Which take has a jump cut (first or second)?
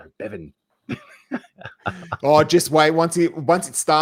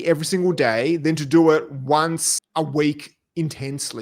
second